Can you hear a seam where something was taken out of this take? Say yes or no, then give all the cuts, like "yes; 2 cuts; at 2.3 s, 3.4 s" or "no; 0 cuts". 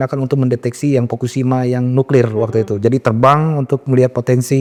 no; 0 cuts